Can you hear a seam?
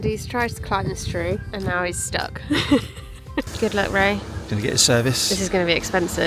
yes; 2 cuts; at 1.5 s, 3.5 s

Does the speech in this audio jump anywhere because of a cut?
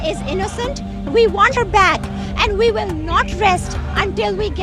yes; 1 cut; at 1.5 s

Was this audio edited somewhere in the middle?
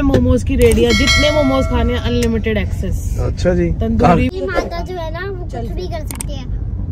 yes; 1 cut; at 4.3 s

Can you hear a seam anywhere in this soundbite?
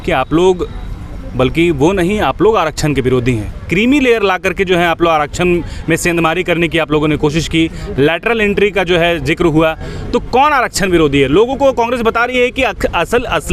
no; 0 cuts

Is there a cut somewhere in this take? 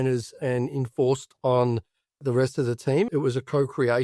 yes; 1 cut; at 3.1 s

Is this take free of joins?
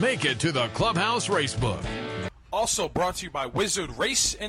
no; 1 cut; at 2.1 s

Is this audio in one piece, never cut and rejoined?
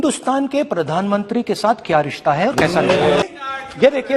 no; 1 cut; at 3.2 s

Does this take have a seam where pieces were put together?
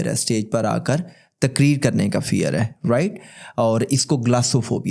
no; 0 cuts

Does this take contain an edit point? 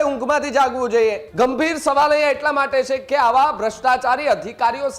yes; 1 cut; at 1.2 s

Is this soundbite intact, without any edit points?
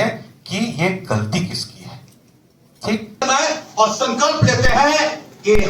no; 1 cut; at 3.2 s

